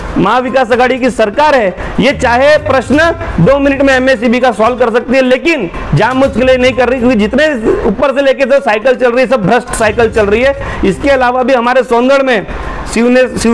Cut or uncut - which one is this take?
uncut